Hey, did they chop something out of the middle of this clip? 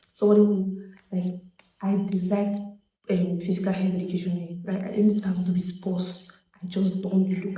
no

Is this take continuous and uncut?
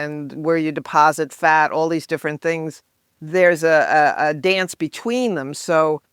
yes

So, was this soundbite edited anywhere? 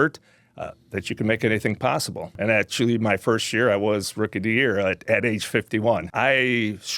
yes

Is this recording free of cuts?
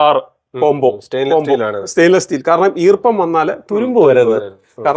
yes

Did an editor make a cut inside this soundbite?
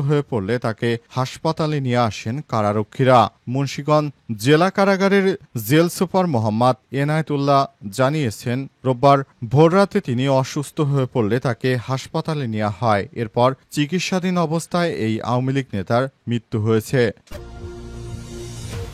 yes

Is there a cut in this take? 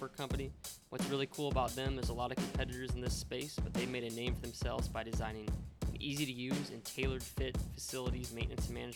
no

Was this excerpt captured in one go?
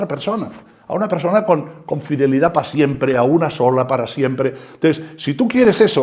yes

